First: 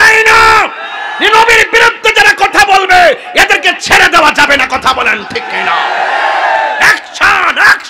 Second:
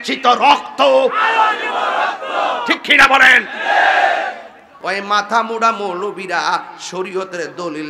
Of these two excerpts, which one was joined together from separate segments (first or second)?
second